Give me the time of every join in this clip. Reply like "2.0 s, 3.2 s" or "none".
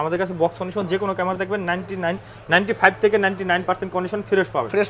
none

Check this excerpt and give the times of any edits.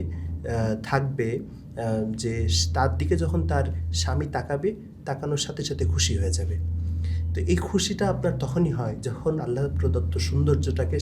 none

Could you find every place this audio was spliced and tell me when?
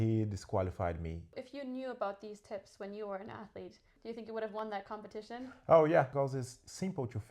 1.3 s, 3.9 s, 6.1 s

